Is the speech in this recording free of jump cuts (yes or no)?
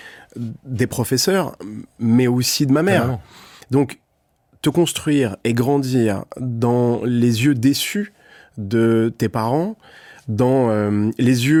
yes